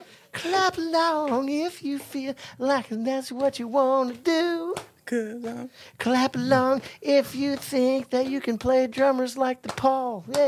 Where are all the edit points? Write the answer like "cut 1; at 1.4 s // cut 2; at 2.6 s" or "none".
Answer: none